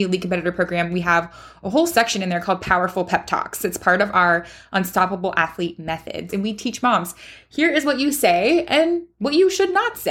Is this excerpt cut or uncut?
cut